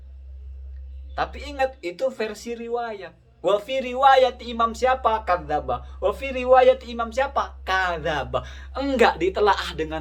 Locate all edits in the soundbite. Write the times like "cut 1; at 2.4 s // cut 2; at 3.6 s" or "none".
none